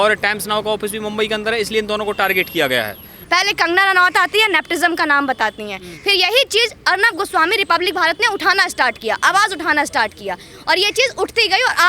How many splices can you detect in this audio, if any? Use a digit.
1